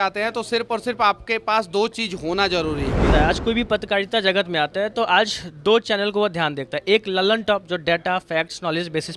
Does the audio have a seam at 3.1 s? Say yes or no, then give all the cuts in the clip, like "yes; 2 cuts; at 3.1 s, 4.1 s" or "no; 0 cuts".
yes; 1 cut; at 3.1 s